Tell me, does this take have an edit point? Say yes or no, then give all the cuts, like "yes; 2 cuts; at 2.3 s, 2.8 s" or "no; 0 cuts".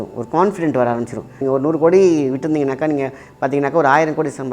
yes; 1 cut; at 1.4 s